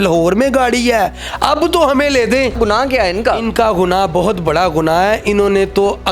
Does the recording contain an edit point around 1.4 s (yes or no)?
no